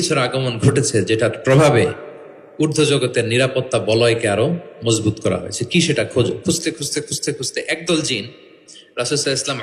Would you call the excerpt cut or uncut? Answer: uncut